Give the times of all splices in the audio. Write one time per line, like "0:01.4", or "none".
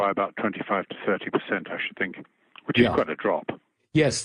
0:01.7